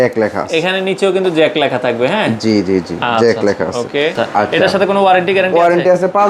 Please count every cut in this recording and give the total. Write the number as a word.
one